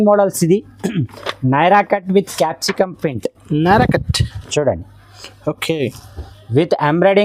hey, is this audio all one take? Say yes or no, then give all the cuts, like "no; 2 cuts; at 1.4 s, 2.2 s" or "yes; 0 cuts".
yes; 0 cuts